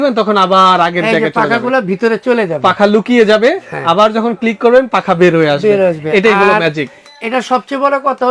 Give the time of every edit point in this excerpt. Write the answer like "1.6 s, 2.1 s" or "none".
none